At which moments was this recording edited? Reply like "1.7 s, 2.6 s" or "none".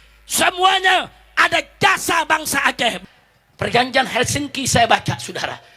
3.0 s